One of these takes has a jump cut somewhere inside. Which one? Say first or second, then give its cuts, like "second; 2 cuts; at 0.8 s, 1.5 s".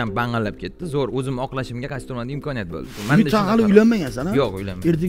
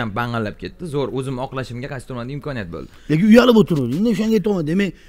first; 1 cut; at 3.0 s